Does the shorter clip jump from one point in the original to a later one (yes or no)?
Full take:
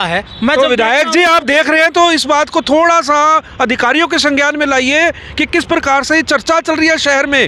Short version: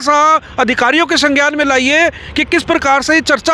no